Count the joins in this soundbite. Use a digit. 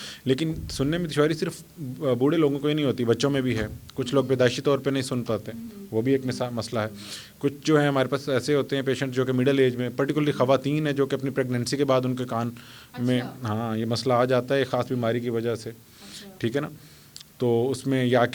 0